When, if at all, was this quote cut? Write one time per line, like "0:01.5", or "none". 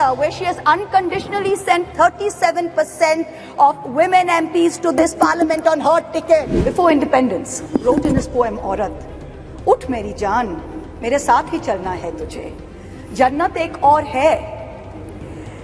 0:06.6